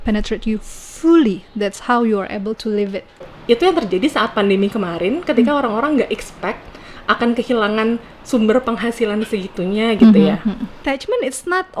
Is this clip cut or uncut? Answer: cut